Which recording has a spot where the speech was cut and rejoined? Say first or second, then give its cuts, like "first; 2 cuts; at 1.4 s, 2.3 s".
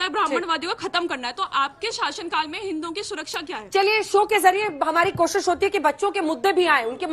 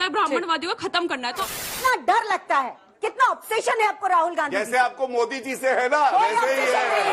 second; 1 cut; at 1.7 s